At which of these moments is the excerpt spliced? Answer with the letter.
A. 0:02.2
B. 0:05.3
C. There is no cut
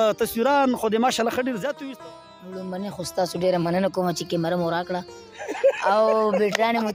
A